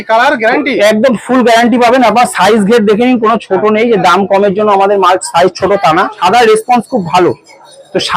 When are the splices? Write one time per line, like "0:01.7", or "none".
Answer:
0:06.1